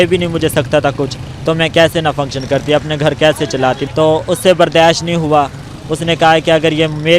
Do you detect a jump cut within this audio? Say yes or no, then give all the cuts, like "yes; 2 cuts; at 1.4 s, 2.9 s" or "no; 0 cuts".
yes; 1 cut; at 3.8 s